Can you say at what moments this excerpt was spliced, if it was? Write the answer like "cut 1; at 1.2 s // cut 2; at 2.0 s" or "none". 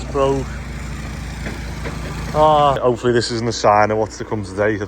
cut 1; at 2.8 s